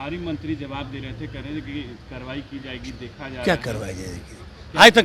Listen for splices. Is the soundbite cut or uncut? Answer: uncut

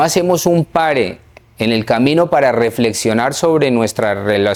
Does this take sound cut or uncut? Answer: uncut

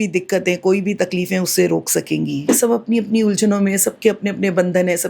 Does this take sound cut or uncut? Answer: cut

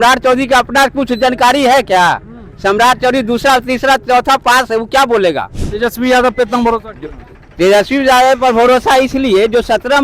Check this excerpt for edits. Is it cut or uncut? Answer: cut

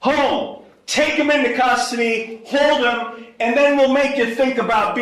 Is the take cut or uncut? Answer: uncut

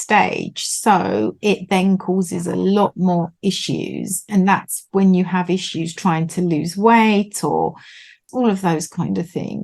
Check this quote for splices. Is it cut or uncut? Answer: cut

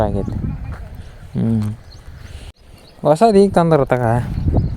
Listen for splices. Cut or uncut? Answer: cut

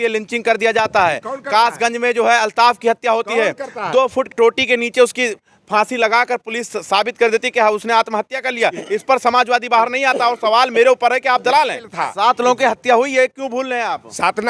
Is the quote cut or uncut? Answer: cut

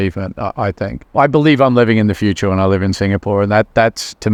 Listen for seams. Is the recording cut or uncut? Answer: uncut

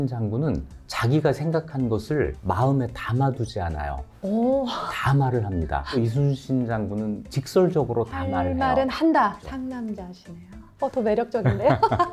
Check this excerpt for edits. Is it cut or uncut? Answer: cut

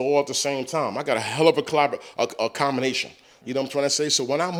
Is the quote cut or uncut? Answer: uncut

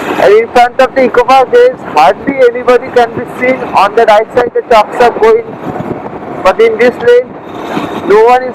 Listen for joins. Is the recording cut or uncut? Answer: uncut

